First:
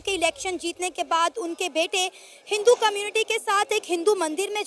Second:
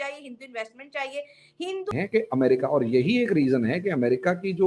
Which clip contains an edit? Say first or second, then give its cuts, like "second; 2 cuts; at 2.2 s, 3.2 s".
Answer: second; 1 cut; at 1.9 s